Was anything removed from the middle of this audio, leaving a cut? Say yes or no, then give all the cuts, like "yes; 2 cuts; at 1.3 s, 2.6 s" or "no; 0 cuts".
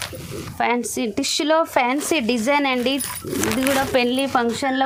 no; 0 cuts